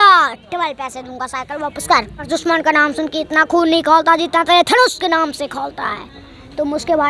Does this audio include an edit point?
yes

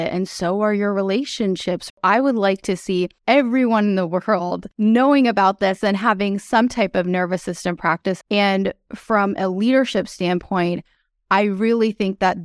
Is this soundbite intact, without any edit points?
no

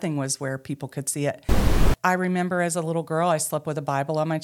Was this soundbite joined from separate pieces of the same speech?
yes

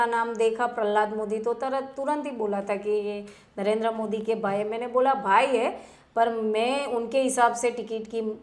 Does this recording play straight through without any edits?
yes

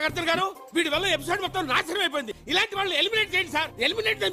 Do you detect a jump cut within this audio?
no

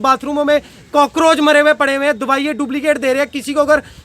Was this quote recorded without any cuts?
yes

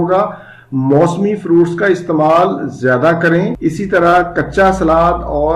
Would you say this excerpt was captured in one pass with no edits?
no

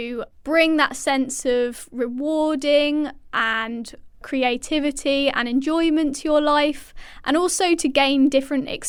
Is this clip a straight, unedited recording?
yes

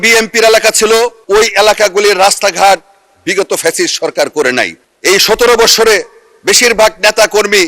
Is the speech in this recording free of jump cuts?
no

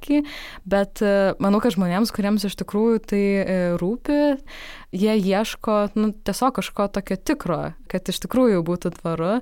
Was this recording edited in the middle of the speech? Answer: yes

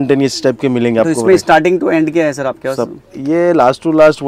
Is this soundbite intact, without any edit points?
yes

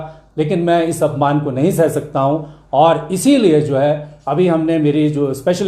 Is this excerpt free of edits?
yes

